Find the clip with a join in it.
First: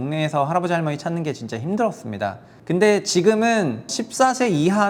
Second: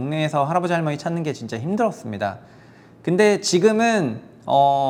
first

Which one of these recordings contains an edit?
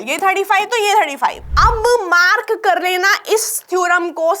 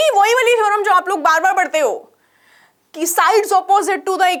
first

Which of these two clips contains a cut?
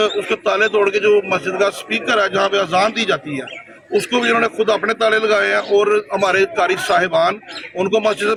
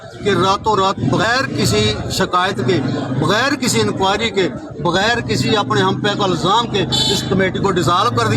second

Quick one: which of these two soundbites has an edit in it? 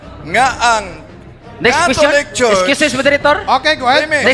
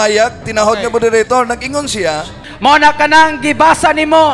second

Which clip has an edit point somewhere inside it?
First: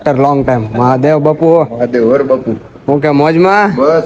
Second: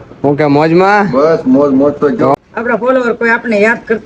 second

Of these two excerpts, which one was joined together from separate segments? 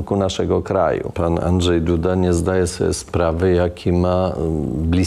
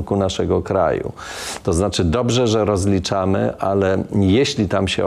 first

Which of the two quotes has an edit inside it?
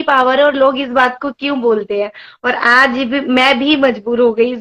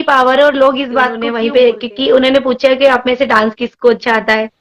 second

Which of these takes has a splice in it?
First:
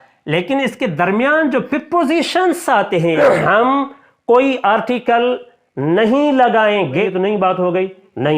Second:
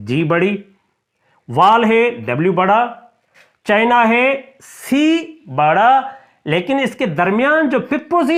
first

